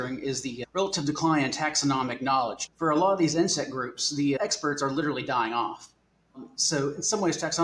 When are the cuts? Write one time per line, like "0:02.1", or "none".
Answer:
0:02.6
0:04.4